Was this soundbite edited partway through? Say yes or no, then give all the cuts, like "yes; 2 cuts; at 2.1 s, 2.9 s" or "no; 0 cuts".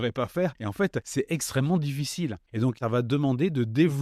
yes; 2 cuts; at 0.8 s, 2.8 s